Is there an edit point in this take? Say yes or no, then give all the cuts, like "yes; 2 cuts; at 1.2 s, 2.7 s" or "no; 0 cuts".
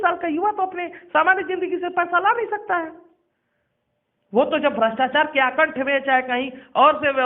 no; 0 cuts